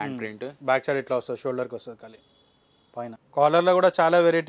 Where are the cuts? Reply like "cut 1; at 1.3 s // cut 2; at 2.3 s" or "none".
cut 1; at 3.2 s